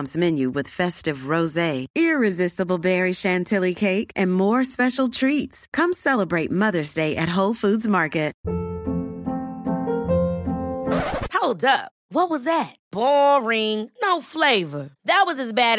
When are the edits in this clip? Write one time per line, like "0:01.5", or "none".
0:08.4